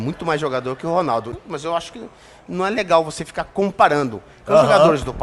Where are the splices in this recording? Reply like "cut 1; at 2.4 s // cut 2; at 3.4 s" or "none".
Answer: cut 1; at 1.3 s